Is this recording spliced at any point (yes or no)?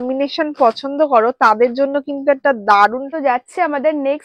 yes